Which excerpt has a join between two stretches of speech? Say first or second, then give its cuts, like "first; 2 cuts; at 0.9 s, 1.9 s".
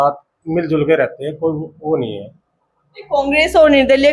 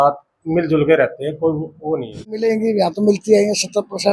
second; 1 cut; at 2.5 s